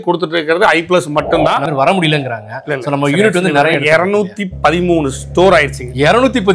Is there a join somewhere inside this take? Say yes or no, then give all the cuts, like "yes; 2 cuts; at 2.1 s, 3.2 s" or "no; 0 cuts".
yes; 1 cut; at 1.6 s